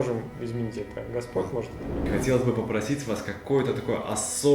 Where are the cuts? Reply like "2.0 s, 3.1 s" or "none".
2.0 s